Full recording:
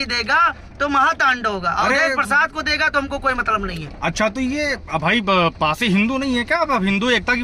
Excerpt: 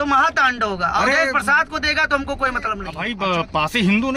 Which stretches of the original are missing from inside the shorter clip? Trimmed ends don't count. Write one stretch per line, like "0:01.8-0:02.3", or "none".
0:03.8-0:05.1